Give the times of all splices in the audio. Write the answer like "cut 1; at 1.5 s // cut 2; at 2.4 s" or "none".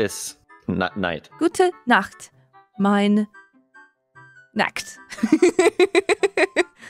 cut 1; at 1.2 s